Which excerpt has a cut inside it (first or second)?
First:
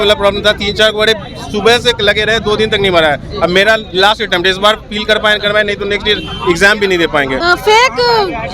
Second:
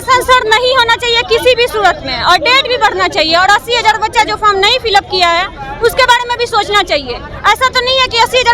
first